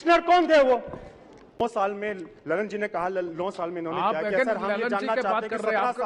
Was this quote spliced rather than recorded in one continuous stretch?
yes; 1 cut; at 1.4 s

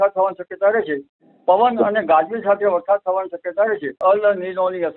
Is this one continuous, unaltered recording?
no; 1 cut; at 3.9 s

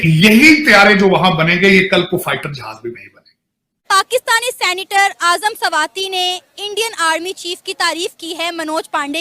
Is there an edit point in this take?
yes; 1 cut; at 3.7 s

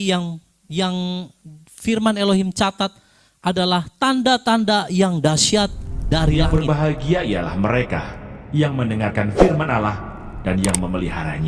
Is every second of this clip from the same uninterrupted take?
no; 1 cut; at 6.4 s

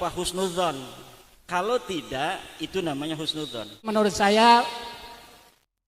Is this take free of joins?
no; 1 cut; at 3.9 s

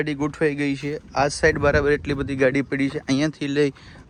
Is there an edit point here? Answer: no; 0 cuts

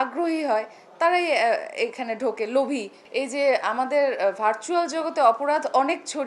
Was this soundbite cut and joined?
yes; 1 cut; at 3.0 s

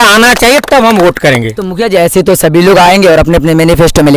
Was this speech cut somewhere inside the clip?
no; 0 cuts

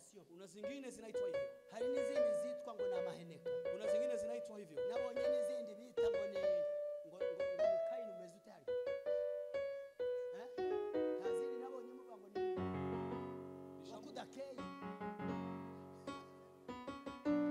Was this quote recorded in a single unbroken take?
yes; 0 cuts

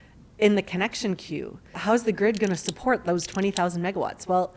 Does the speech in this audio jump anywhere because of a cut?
yes; 1 cut; at 1.8 s

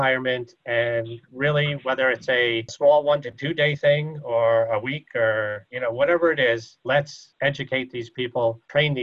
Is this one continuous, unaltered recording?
yes; 0 cuts

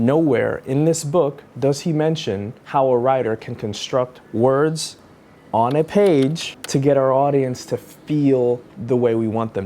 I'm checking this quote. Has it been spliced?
yes; 1 cut; at 2.5 s

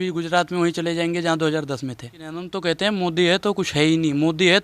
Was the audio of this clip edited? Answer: yes; 1 cut; at 2.5 s

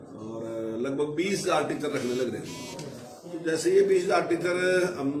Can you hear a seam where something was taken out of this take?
no; 0 cuts

